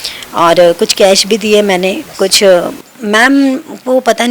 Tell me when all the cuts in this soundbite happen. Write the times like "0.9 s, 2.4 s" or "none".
2.8 s